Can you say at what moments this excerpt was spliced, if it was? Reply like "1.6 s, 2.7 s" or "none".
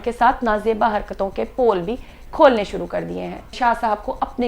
3.5 s